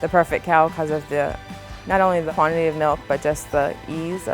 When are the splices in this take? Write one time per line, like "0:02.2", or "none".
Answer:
0:02.2